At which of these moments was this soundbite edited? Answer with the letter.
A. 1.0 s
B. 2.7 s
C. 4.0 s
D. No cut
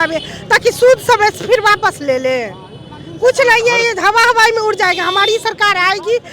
D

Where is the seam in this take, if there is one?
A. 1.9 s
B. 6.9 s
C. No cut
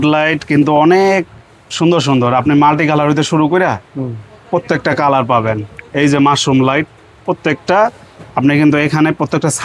C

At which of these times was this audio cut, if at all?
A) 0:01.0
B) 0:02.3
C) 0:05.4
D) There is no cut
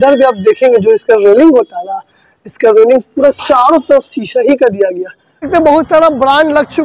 C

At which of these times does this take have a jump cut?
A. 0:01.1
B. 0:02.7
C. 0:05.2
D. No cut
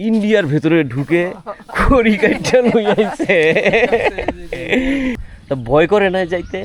C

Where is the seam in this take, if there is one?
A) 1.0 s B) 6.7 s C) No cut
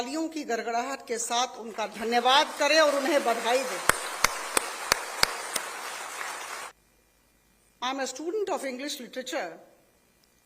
B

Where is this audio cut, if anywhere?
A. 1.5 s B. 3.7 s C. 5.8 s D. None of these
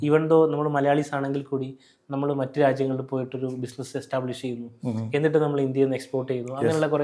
D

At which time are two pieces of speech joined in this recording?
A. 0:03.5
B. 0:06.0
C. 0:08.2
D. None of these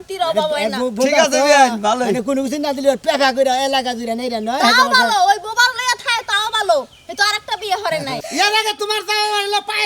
C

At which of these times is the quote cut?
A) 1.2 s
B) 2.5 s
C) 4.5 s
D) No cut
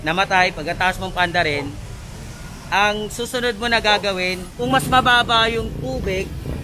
C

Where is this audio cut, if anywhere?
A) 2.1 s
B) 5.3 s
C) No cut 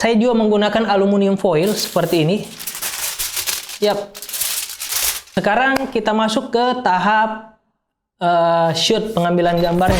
B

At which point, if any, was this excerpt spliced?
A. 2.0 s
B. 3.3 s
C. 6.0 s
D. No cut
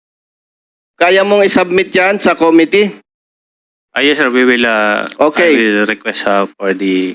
D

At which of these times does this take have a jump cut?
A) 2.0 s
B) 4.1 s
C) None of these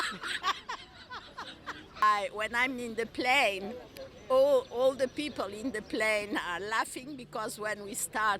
A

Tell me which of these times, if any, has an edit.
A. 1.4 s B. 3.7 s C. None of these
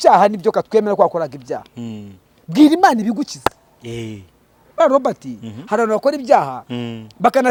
C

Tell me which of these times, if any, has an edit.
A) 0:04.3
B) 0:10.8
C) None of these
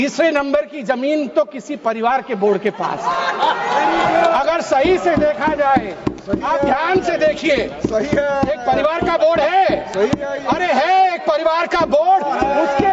C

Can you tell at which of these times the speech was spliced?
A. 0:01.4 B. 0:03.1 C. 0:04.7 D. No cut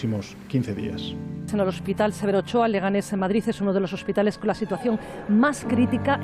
A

